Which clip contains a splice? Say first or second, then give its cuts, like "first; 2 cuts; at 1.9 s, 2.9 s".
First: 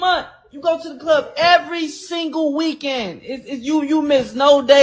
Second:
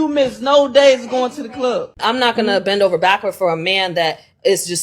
second; 1 cut; at 1.9 s